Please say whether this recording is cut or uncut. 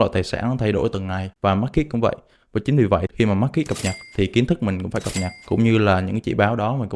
cut